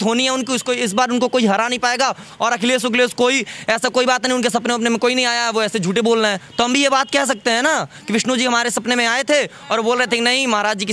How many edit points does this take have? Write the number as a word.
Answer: zero